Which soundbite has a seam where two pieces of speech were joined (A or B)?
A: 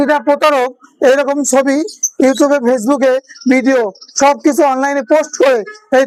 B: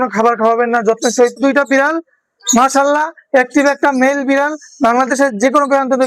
B